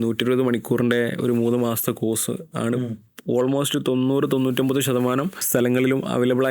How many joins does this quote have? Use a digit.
1